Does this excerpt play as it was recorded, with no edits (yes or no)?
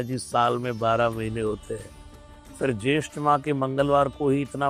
yes